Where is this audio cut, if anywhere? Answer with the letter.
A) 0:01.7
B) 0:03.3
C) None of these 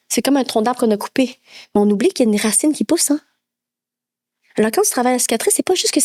C